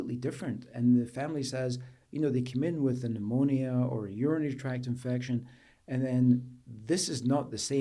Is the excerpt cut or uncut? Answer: uncut